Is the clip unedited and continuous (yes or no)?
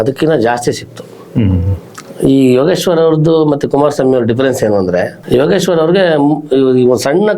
yes